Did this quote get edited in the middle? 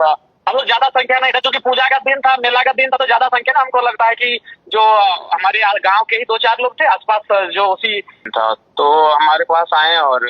yes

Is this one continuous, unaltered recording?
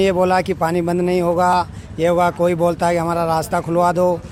yes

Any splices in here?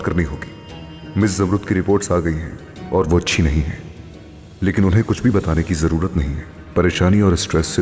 no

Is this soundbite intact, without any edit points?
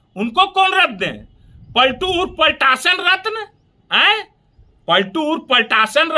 yes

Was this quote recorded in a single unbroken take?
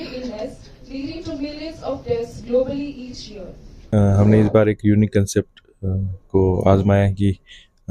no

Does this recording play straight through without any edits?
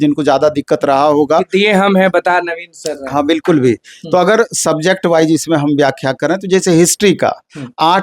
yes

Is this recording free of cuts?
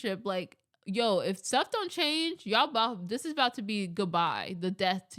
yes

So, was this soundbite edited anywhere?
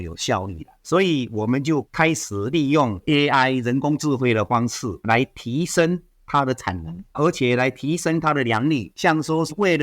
yes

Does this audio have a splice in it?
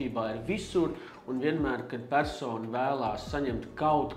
no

